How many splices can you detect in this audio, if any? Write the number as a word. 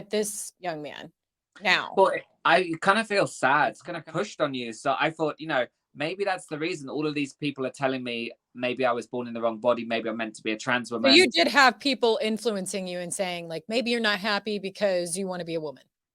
one